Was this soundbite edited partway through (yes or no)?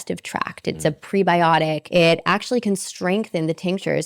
yes